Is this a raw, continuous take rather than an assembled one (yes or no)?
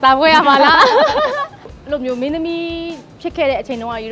no